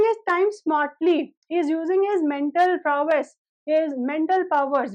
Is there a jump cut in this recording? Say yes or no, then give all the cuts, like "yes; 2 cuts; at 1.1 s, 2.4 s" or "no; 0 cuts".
no; 0 cuts